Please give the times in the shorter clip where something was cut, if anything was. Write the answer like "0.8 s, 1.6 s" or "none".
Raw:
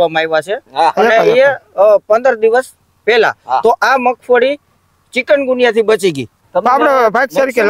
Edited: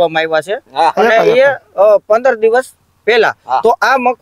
none